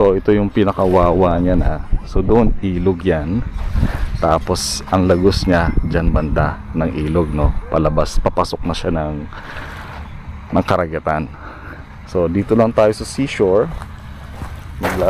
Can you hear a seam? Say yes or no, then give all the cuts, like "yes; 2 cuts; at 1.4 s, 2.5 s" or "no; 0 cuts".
no; 0 cuts